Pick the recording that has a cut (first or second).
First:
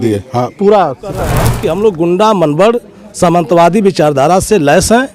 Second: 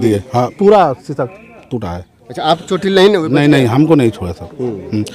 first